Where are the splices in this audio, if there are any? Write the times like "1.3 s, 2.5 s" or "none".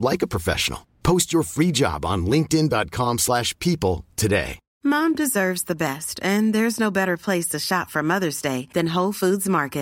4.6 s